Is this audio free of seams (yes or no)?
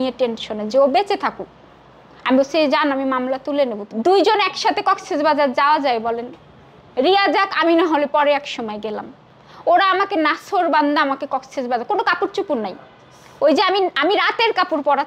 no